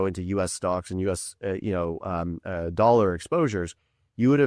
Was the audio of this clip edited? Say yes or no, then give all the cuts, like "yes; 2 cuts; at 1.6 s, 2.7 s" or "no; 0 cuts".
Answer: no; 0 cuts